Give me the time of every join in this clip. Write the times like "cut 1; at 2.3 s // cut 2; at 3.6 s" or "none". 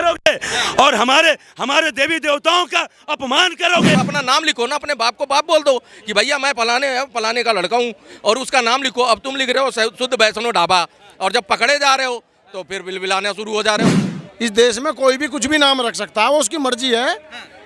cut 1; at 4.0 s // cut 2; at 14.0 s